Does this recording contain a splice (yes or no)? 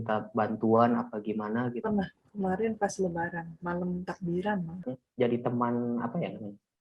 yes